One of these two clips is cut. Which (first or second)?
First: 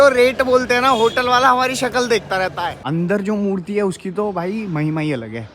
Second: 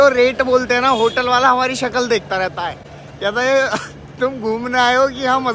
first